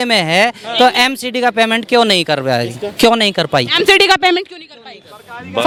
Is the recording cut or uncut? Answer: uncut